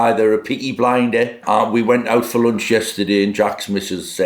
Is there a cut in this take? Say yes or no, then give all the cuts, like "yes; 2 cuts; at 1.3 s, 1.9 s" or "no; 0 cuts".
no; 0 cuts